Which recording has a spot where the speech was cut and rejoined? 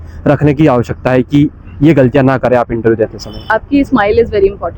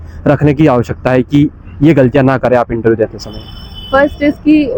first; 1 cut; at 3.4 s

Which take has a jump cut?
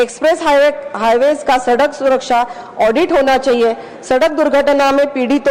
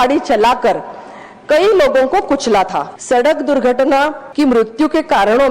second; 2 cuts; at 2.9 s, 4.2 s

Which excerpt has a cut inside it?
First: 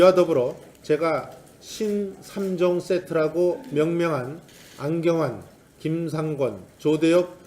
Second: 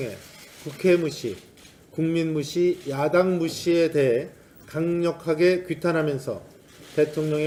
first; 1 cut; at 3.4 s

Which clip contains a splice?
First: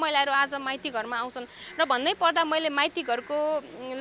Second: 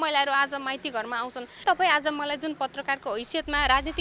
second; 1 cut; at 1.6 s

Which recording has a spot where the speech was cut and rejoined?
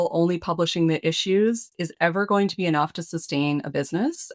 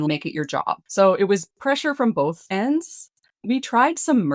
second; 2 cuts; at 0.9 s, 2.4 s

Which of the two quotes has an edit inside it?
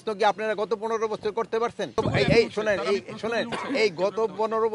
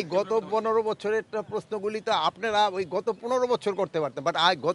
first; 1 cut; at 2.0 s

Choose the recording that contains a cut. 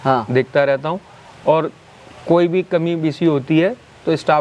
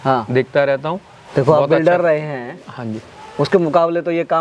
second; 1 cut; at 1.2 s

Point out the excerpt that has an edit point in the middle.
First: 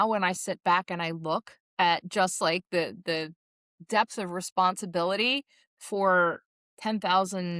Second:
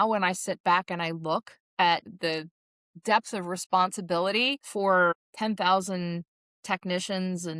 second; 3 cuts; at 2.1 s, 4.6 s, 5.3 s

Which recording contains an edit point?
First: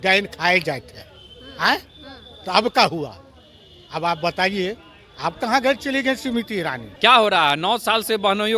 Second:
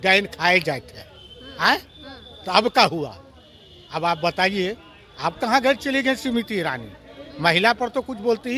first; 1 cut; at 6.8 s

